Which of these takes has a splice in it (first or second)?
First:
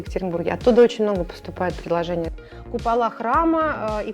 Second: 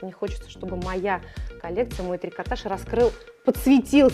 first